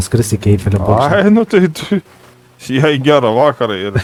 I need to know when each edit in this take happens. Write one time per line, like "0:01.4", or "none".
none